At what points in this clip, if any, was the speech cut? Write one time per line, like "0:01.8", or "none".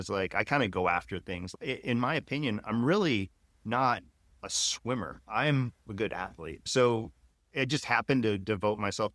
0:06.7